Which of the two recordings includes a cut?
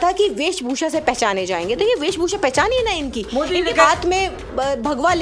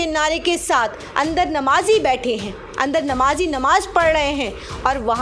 first; 1 cut; at 3.7 s

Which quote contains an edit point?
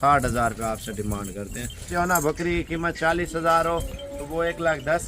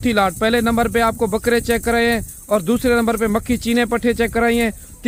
first; 1 cut; at 1.9 s

